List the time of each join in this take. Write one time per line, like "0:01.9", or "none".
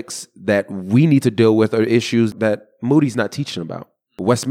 0:02.3